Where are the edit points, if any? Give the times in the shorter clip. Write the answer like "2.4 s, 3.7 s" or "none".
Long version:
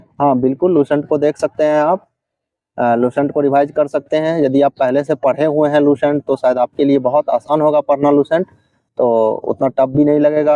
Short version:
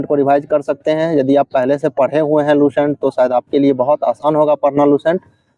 none